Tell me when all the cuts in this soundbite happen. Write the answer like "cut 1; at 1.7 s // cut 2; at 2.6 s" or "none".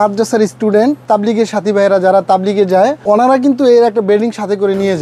cut 1; at 1.0 s // cut 2; at 3.0 s